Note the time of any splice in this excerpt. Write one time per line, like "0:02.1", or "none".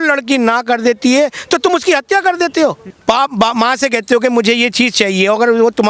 0:02.9